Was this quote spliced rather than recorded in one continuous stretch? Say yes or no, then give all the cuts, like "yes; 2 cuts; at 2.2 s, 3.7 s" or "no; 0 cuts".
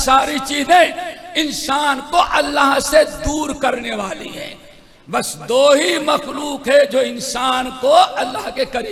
no; 0 cuts